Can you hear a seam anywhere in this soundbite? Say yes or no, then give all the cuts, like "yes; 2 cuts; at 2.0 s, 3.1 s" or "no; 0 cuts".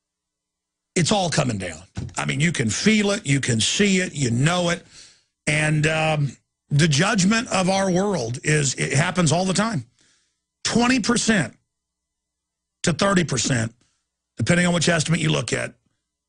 yes; 1 cut; at 6.2 s